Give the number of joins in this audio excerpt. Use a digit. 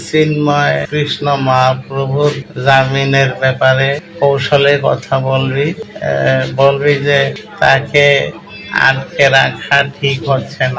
5